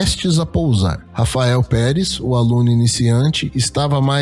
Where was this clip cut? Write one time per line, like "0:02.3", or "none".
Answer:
0:01.0